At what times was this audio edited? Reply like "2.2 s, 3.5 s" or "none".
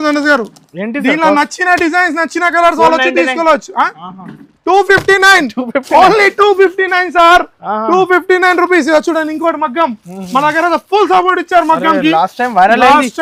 none